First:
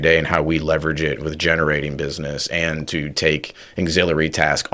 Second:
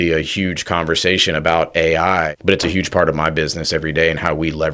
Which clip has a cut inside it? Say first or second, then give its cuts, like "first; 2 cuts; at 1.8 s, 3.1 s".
second; 1 cut; at 2.3 s